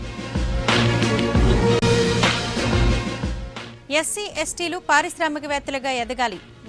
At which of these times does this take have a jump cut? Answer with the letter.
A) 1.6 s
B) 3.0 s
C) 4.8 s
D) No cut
D